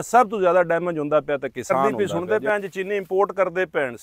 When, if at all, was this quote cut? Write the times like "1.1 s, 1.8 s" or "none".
1.9 s